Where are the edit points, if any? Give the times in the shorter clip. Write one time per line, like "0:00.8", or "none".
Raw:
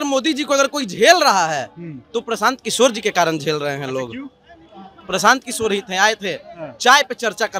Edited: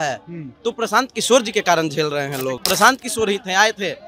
0:02.6